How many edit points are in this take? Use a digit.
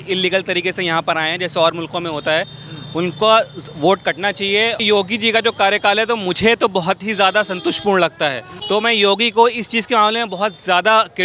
2